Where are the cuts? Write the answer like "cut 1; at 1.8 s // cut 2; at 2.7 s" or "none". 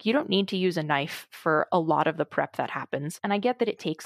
cut 1; at 3.1 s